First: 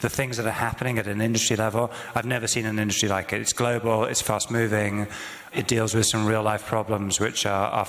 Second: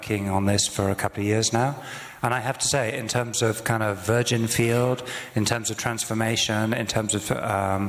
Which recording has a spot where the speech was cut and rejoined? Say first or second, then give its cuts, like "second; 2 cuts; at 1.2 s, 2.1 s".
first; 1 cut; at 5.5 s